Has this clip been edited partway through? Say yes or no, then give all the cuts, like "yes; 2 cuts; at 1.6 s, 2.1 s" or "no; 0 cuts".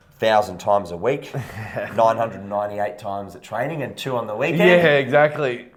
no; 0 cuts